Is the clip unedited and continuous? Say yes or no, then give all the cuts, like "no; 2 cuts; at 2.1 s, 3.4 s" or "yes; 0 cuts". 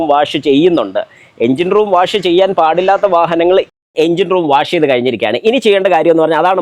no; 1 cut; at 3.8 s